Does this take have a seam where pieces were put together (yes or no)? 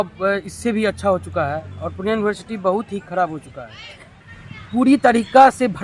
yes